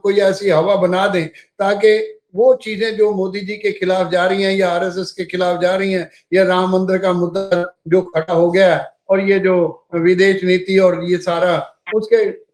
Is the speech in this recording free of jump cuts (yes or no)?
yes